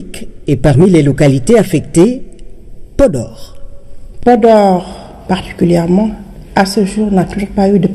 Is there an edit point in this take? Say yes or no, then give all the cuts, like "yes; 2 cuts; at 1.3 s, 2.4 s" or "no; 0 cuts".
no; 0 cuts